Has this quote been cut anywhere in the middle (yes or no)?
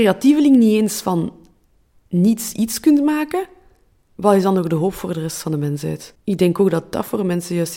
yes